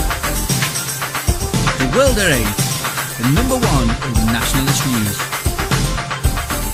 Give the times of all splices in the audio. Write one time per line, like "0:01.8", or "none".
none